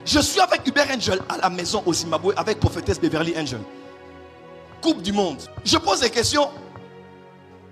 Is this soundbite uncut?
no; 1 cut; at 5.5 s

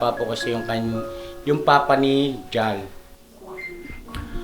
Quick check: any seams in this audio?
yes; 1 cut; at 3.1 s

